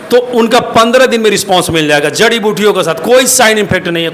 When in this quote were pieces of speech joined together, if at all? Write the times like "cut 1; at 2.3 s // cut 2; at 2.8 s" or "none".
none